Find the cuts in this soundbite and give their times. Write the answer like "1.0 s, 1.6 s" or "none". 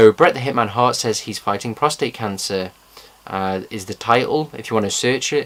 none

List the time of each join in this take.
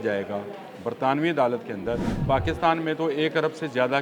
2.1 s

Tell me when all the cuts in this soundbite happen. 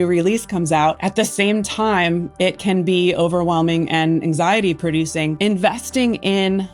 1.0 s, 5.3 s

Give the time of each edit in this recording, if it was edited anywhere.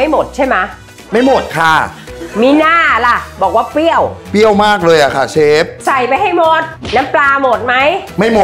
none

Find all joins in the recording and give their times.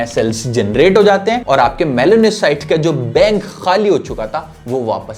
none

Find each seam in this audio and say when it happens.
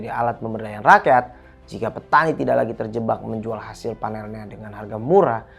none

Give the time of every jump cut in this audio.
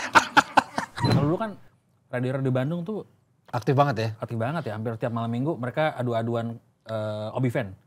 1.1 s

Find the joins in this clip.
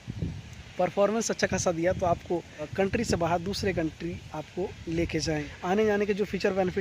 2.6 s, 5.6 s

